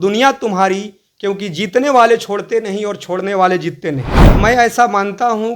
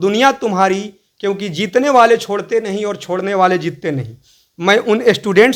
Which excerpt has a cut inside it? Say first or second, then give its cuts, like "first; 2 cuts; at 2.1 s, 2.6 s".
first; 1 cut; at 4.2 s